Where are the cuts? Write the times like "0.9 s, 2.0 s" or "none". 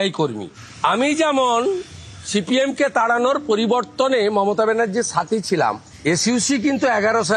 none